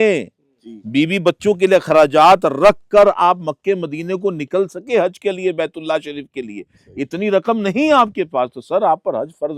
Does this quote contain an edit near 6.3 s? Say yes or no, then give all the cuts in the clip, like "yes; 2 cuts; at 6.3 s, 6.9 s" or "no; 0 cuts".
no; 0 cuts